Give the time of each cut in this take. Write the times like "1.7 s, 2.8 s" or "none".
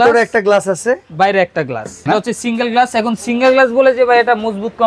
2.1 s